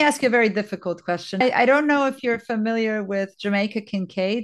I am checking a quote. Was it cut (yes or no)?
yes